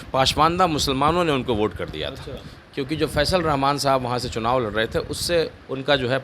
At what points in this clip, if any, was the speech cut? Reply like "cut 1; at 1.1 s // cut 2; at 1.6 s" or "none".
none